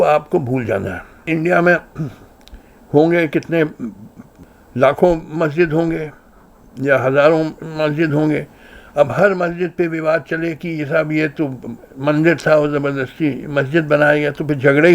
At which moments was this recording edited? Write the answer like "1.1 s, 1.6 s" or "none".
1.1 s